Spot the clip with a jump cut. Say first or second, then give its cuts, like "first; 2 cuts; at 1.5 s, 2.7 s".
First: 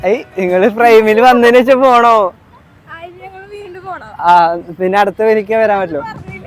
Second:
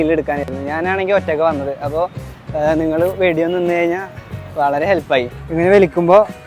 second; 1 cut; at 5.4 s